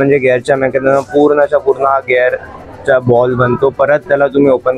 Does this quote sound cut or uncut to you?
uncut